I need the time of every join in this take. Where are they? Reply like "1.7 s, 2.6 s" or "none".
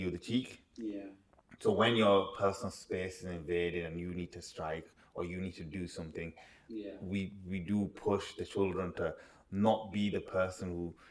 none